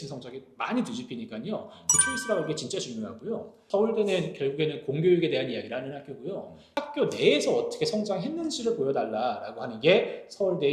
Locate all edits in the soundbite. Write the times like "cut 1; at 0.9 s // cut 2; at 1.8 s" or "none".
cut 1; at 3.6 s